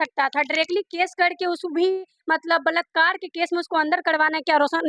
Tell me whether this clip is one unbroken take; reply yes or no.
yes